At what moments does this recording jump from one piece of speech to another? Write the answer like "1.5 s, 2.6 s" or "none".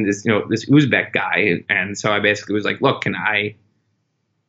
1.7 s